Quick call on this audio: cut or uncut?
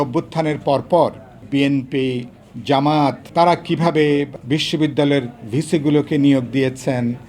cut